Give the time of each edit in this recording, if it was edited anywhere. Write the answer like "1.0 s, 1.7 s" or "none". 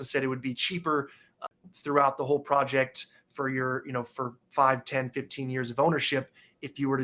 1.4 s